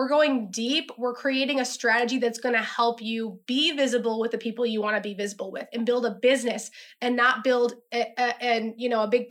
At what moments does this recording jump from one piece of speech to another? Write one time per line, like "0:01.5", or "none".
none

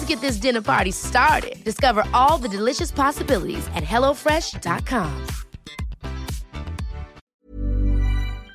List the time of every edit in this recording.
0:07.2

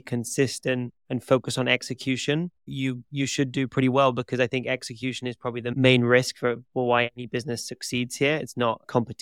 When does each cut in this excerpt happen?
0:01.0
0:02.6

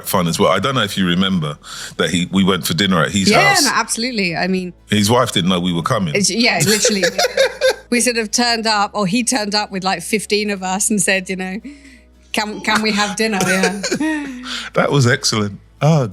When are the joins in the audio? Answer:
none

